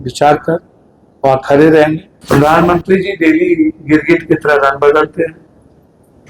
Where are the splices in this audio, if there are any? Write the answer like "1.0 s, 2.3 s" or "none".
2.1 s